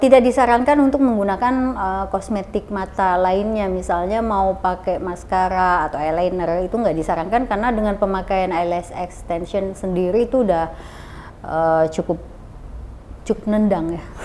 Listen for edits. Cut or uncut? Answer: uncut